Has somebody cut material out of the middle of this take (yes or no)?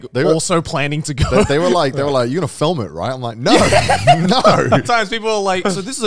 yes